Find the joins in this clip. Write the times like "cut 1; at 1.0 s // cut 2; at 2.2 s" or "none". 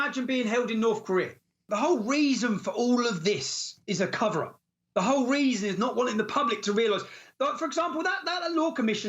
cut 1; at 1.7 s

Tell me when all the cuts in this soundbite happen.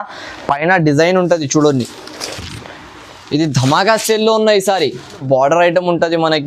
cut 1; at 5.2 s

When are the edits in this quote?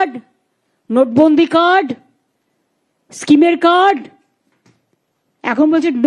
none

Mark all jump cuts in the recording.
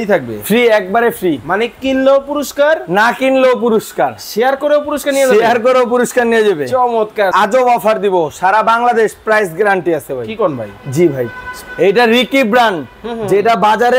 cut 1; at 7.3 s

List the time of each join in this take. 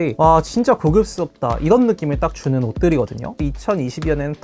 cut 1; at 3.3 s

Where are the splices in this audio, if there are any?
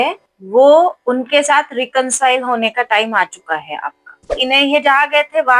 cut 1; at 4.4 s

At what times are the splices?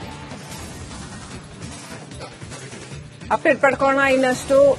none

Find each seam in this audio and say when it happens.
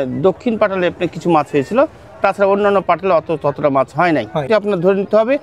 cut 1; at 4.5 s

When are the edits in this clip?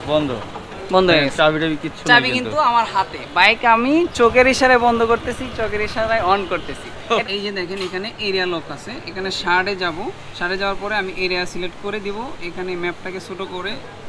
cut 1; at 7.2 s

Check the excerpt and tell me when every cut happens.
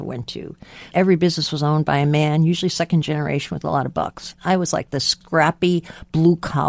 cut 1; at 0.9 s // cut 2; at 4.3 s // cut 3; at 5.2 s

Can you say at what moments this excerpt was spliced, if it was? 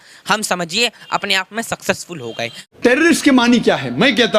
cut 1; at 2.6 s

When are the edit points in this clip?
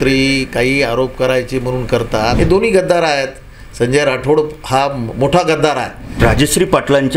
cut 1; at 2.3 s // cut 2; at 6.0 s

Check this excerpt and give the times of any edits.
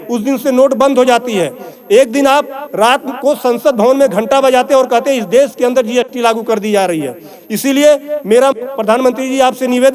none

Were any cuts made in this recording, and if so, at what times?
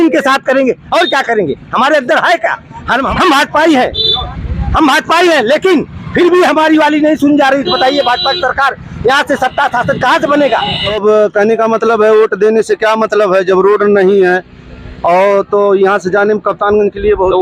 cut 1; at 3.1 s // cut 2; at 10.9 s

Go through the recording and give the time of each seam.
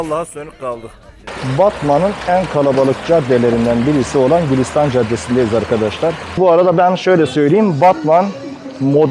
cut 1; at 1.3 s // cut 2; at 6.4 s

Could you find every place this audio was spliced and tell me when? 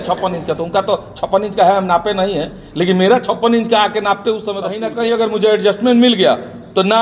cut 1; at 4.8 s

